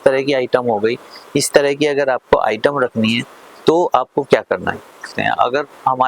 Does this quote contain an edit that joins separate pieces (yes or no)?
yes